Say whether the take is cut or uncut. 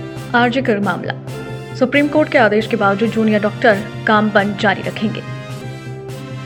uncut